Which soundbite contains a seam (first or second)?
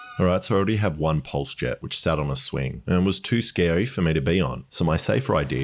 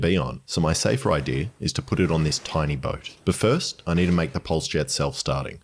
first